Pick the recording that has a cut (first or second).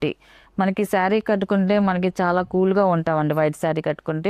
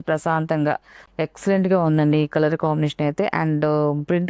second